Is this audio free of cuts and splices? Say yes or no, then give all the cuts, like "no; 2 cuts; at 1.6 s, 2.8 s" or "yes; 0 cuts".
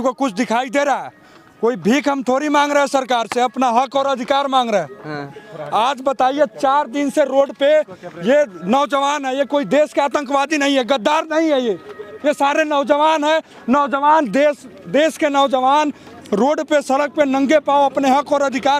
yes; 0 cuts